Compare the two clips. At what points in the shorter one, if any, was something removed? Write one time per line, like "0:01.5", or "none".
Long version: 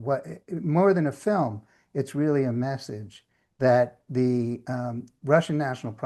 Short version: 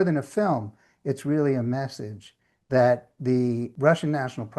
0:03.7